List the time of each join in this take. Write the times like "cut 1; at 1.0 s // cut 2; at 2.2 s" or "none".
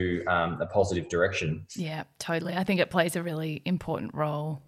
none